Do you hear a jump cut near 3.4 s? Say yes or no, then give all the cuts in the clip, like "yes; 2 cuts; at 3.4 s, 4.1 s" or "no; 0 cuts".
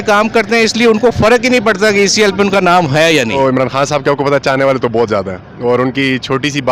yes; 1 cut; at 3.4 s